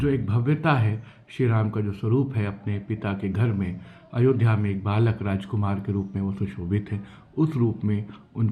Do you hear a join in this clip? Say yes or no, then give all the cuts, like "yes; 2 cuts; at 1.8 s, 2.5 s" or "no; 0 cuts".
no; 0 cuts